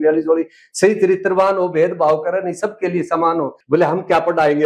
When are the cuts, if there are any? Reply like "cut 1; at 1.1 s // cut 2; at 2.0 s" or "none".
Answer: cut 1; at 3.6 s

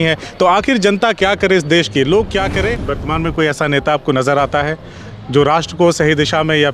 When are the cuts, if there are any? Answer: cut 1; at 2.8 s

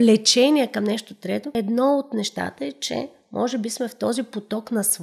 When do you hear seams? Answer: cut 1; at 1.5 s

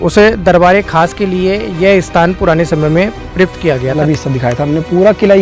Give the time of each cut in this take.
cut 1; at 4.0 s

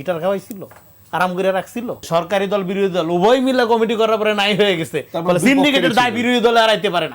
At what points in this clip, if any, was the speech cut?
cut 1; at 2.1 s

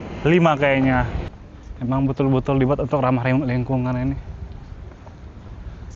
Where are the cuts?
cut 1; at 1.2 s

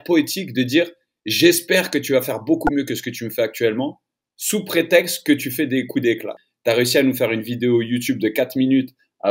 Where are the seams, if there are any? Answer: cut 1; at 6.4 s

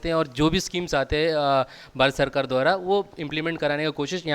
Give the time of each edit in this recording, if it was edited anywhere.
none

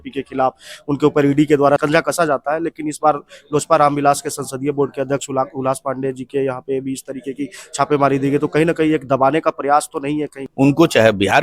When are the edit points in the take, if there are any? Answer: cut 1; at 1.8 s // cut 2; at 10.4 s

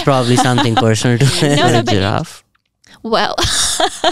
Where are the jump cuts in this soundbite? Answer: cut 1; at 1.8 s

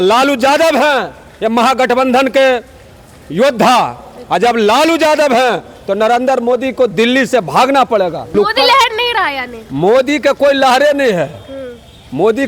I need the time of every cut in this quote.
cut 1; at 8.3 s

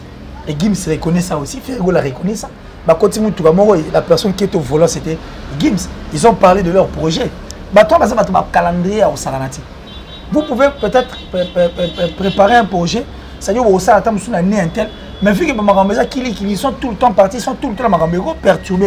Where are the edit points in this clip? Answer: none

